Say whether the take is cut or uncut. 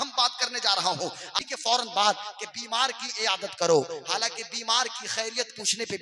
cut